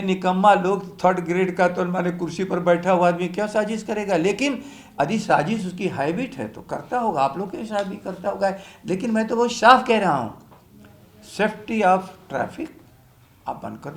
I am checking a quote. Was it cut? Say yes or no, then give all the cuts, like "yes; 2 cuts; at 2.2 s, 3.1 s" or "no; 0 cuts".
no; 0 cuts